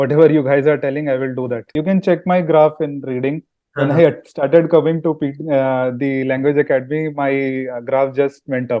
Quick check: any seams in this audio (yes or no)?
yes